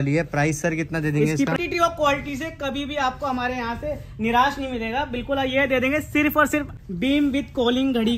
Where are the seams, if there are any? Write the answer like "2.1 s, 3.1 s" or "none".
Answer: 1.6 s, 6.7 s